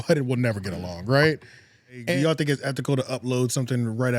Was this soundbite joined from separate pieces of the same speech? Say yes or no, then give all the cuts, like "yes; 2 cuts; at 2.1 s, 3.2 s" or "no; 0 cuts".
yes; 1 cut; at 2.0 s